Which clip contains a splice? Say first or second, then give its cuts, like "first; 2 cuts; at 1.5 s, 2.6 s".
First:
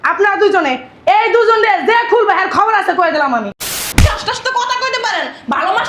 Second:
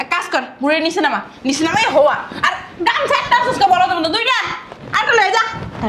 first; 1 cut; at 3.6 s